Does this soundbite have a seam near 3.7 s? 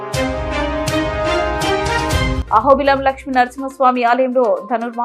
no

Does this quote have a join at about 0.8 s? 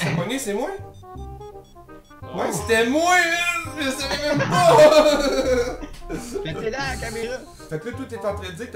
yes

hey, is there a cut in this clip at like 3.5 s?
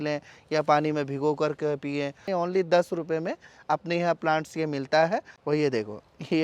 no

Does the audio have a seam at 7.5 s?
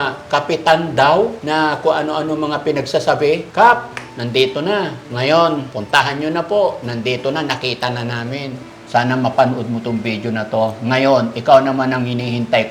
no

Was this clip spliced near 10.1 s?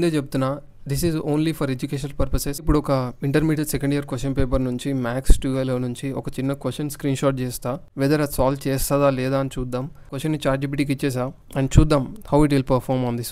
yes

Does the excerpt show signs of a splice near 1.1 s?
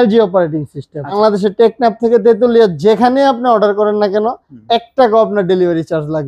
yes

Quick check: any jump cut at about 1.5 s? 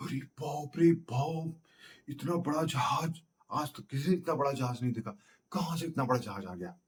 no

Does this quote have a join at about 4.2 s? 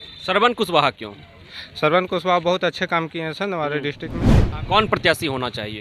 yes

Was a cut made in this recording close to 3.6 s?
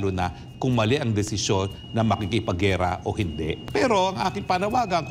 yes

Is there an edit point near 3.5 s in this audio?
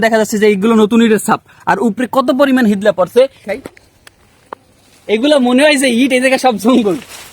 yes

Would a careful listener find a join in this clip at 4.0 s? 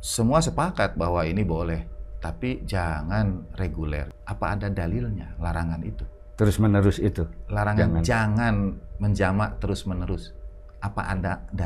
yes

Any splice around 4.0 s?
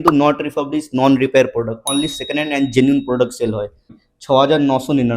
yes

